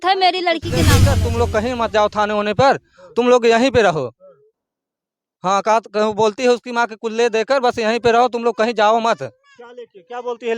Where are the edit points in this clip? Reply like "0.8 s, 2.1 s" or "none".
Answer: 1.1 s